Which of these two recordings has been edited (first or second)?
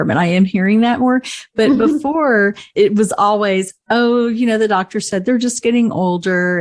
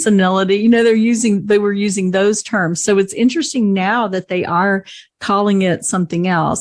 first